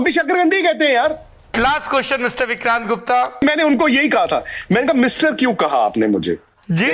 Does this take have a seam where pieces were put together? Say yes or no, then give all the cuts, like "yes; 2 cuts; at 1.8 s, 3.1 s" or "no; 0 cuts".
yes; 2 cuts; at 1.5 s, 3.4 s